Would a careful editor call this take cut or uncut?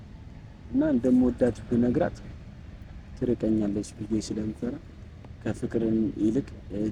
uncut